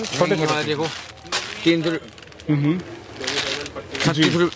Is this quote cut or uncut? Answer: uncut